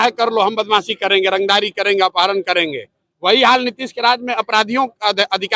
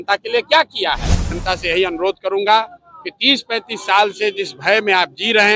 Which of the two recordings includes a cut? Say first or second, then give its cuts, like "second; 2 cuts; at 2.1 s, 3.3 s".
second; 1 cut; at 1.3 s